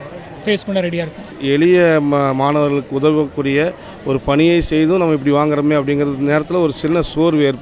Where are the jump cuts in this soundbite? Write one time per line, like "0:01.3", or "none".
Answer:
0:01.3